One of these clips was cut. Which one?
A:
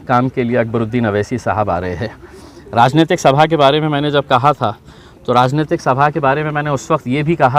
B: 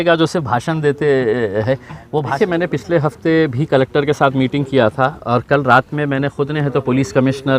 B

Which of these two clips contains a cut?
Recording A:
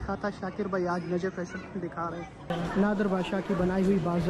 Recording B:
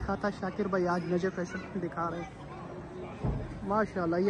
A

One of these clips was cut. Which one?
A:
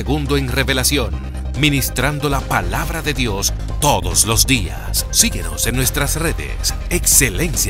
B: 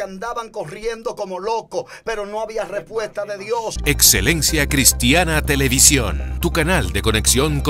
B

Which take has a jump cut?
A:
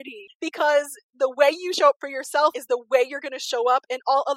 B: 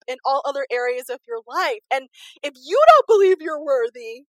A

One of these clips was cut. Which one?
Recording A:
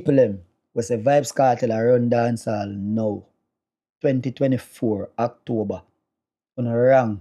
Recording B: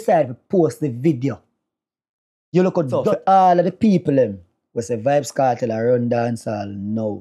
B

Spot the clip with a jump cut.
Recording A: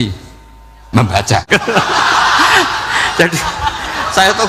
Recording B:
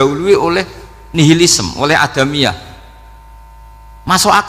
A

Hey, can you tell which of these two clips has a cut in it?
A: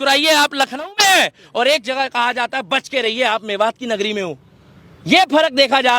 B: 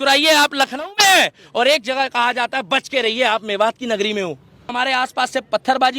B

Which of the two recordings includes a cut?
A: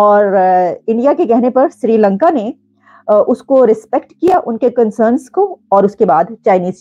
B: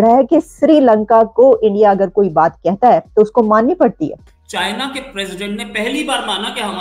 B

